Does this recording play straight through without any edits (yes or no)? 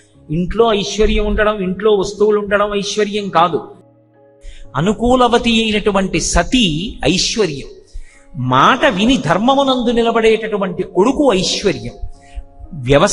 no